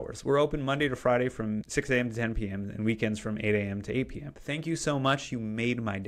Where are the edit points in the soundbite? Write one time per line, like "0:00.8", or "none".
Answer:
0:01.7
0:04.4